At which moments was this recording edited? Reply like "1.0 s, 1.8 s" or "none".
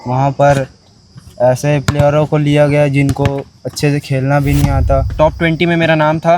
5.1 s

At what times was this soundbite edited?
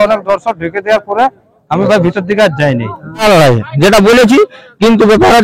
3.2 s

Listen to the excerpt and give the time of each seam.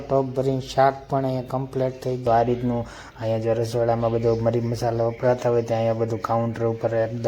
2.2 s

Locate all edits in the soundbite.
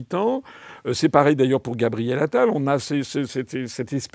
none

